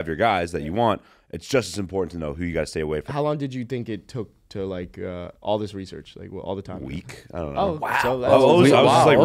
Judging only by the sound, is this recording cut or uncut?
cut